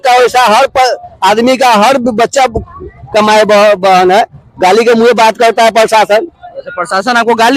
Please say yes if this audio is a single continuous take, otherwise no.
yes